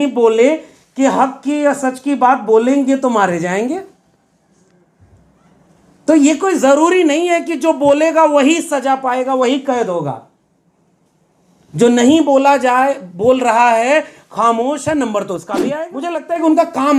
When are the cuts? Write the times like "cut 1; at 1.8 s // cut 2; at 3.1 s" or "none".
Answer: cut 1; at 15.5 s